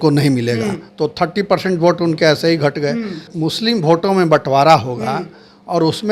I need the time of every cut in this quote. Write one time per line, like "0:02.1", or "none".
0:03.3